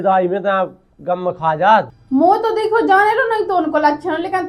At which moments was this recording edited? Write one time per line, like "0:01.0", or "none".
0:02.0